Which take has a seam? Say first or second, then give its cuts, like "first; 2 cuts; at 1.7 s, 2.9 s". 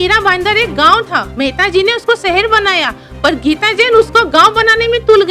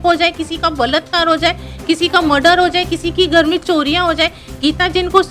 first; 1 cut; at 1.3 s